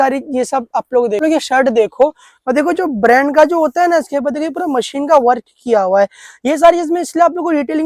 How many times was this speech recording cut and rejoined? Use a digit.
1